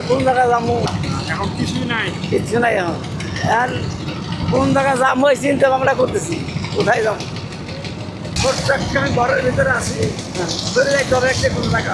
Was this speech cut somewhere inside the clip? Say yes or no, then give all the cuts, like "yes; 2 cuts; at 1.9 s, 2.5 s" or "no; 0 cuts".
yes; 2 cuts; at 0.9 s, 8.3 s